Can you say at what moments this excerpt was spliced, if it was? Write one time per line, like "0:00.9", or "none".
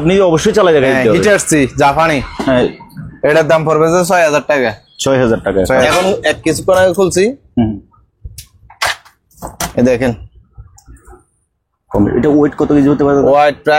0:05.8